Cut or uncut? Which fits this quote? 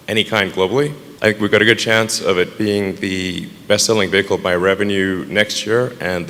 uncut